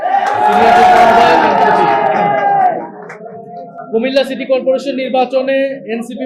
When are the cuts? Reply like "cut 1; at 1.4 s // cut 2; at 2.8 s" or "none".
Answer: none